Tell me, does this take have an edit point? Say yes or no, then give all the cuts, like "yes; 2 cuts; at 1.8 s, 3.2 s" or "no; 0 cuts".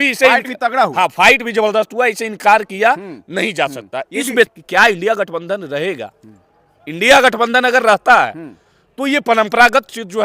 yes; 1 cut; at 4.6 s